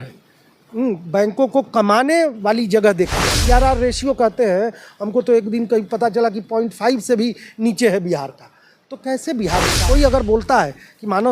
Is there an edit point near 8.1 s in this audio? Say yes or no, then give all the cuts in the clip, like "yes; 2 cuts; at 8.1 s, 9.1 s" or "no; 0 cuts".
no; 2 cuts; at 3.3 s, 9.8 s